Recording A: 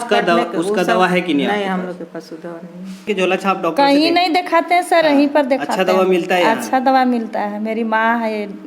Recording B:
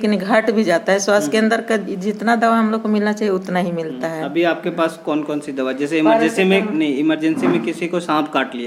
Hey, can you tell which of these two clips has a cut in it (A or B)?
A